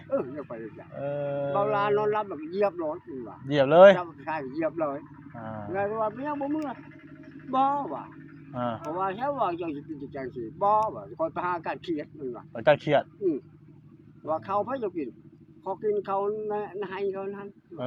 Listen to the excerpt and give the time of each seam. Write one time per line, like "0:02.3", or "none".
none